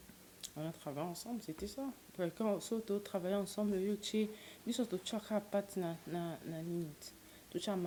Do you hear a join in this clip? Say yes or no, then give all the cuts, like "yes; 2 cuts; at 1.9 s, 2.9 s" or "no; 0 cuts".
no; 0 cuts